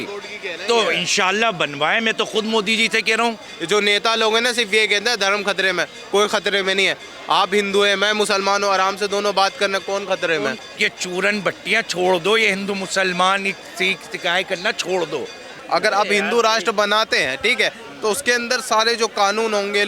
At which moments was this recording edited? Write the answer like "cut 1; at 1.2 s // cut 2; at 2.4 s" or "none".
cut 1; at 3.5 s // cut 2; at 10.6 s // cut 3; at 15.6 s